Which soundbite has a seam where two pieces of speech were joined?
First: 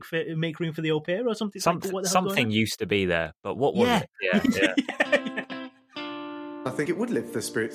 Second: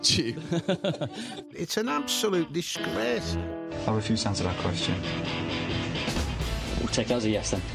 first; 1 cut; at 5.3 s

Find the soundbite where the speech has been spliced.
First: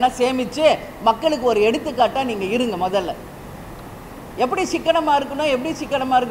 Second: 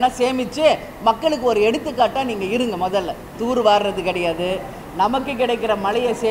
second; 1 cut; at 3.3 s

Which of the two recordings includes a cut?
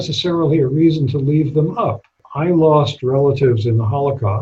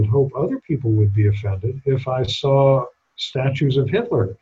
first; 1 cut; at 2.2 s

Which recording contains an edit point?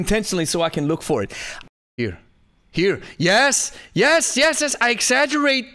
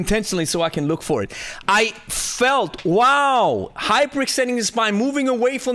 first; 1 cut; at 1.5 s

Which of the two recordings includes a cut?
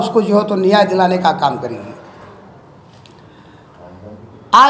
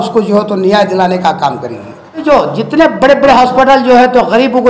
second; 1 cut; at 2.2 s

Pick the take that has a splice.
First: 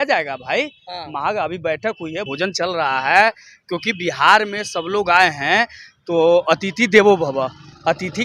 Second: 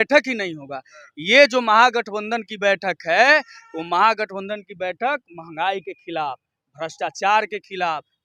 first; 1 cut; at 2.2 s

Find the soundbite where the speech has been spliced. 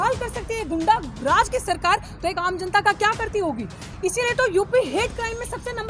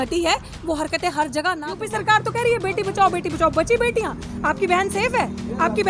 second; 1 cut; at 1.7 s

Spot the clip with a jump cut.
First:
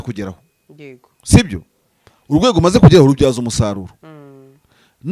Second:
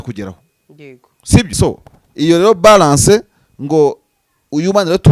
second; 1 cut; at 1.5 s

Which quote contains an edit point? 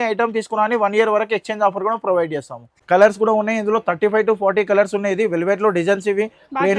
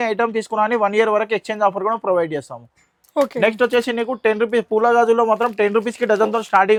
first; 1 cut; at 2.7 s

